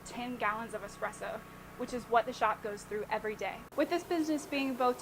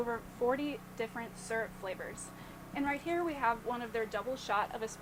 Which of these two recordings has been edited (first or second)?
first